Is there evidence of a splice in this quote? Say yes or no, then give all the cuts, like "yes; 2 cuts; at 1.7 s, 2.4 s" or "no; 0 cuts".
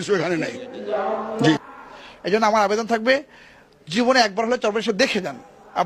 yes; 1 cut; at 1.7 s